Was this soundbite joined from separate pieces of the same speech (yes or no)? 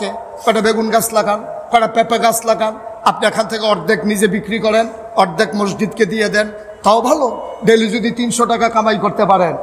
no